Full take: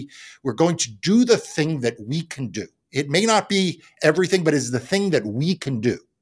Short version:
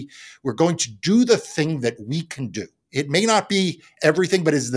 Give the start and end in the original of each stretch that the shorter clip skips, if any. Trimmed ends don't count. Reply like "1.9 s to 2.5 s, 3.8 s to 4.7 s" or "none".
none